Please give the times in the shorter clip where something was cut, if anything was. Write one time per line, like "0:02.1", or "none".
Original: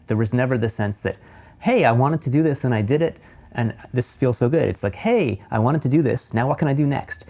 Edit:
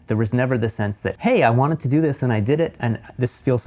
0:01.1
0:02.8